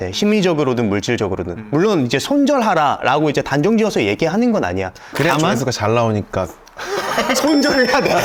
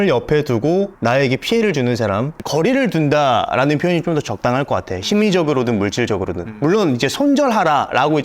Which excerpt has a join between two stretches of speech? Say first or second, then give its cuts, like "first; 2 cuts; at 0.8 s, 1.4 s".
second; 1 cut; at 2.4 s